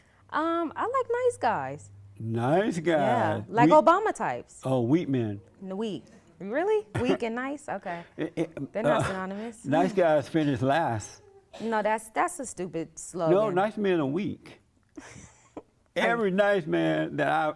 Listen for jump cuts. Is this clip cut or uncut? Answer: uncut